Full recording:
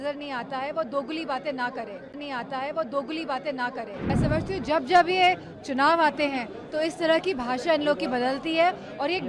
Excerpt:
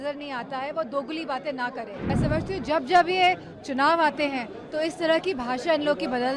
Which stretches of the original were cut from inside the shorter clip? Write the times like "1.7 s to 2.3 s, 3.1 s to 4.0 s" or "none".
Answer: 1.5 s to 3.5 s